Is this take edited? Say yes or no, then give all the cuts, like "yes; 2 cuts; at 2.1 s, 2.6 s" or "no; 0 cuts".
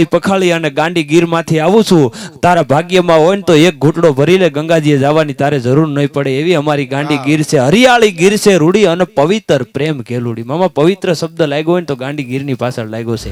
no; 0 cuts